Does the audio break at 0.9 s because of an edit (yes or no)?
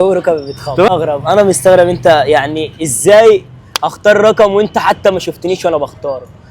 yes